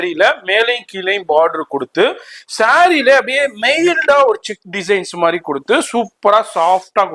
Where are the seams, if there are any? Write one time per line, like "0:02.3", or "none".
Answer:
none